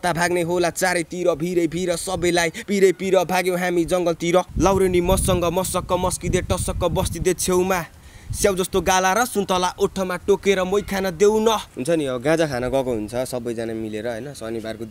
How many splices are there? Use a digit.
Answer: 2